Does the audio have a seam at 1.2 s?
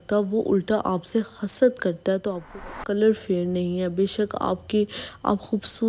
no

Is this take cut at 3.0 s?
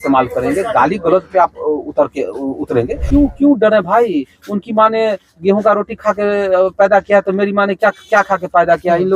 yes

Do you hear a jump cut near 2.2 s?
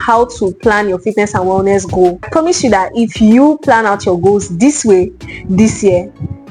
yes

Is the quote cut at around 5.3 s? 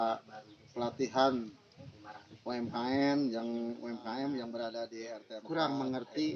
yes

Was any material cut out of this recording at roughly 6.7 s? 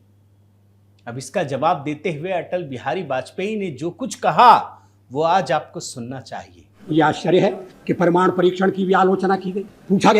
yes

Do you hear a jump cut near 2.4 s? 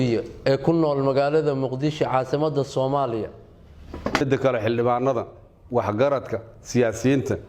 no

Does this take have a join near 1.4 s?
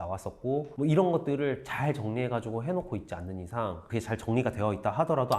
no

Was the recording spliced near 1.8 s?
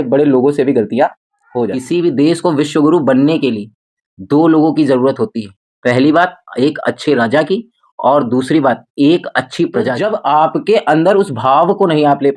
yes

